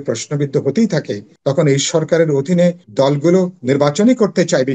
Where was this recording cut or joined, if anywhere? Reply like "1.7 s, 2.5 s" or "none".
1.2 s, 2.8 s